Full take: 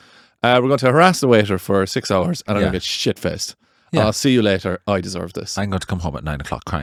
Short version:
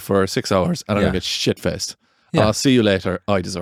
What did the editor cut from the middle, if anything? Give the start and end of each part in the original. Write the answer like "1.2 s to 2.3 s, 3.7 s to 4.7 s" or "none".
none